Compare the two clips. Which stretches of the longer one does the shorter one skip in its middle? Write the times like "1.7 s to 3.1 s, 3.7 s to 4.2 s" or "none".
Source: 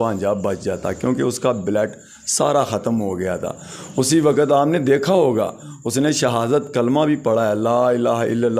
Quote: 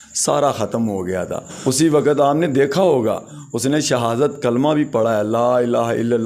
3.6 s to 3.8 s